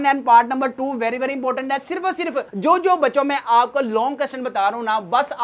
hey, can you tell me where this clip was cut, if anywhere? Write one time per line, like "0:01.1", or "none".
none